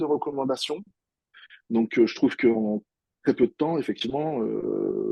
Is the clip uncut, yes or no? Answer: no